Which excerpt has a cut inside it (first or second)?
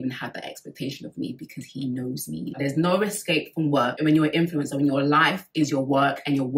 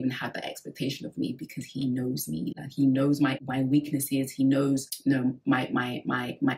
first